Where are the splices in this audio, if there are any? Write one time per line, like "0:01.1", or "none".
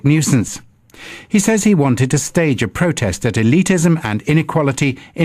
0:03.7